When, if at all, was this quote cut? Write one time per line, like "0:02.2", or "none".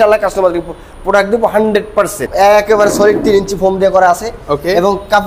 0:02.2

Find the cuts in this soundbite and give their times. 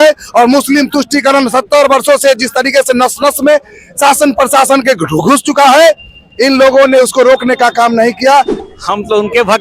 0:08.6

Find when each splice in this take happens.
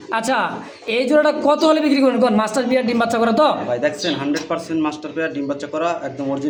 none

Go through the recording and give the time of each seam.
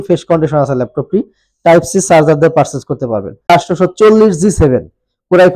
0:03.5

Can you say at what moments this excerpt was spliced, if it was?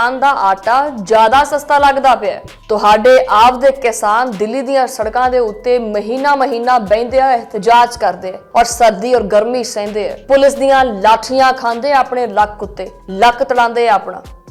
none

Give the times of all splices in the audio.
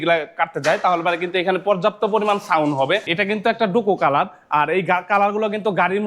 0:03.1

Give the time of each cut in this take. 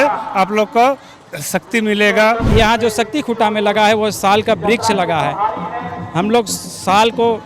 0:02.5

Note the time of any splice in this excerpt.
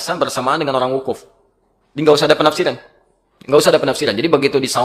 none

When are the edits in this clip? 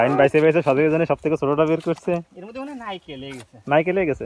none

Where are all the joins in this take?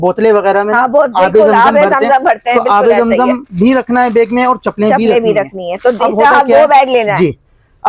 none

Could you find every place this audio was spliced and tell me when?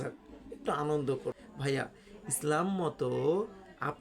0:01.5

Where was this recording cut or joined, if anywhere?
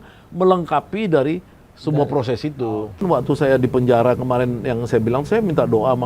0:03.0

